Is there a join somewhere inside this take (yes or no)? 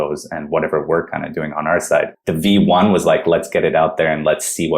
yes